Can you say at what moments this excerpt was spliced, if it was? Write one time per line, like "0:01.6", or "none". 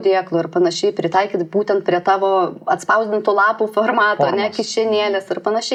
none